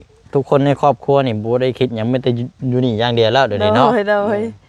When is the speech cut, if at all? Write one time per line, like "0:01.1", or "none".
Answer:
none